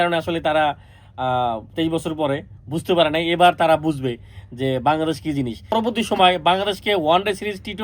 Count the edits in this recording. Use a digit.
1